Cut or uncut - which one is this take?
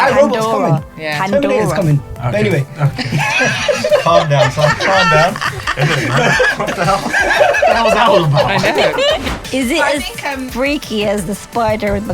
cut